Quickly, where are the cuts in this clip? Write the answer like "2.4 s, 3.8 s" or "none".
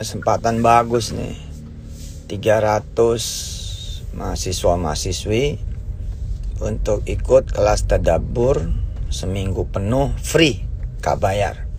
none